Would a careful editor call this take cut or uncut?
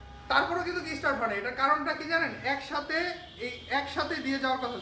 uncut